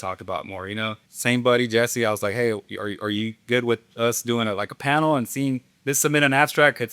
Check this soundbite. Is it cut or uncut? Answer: cut